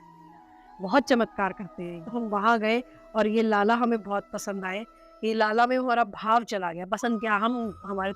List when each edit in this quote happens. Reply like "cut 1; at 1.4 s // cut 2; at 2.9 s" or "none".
cut 1; at 1.8 s